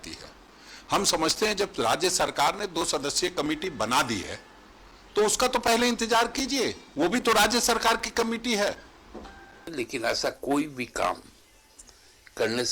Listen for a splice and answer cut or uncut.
uncut